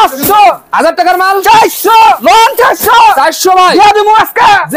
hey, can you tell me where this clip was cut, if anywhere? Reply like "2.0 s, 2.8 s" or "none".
2.2 s